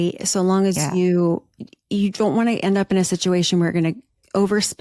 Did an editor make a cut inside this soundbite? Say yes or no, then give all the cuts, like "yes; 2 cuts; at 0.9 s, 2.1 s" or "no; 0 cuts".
no; 0 cuts